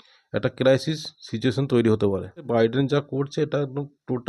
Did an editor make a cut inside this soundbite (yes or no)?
yes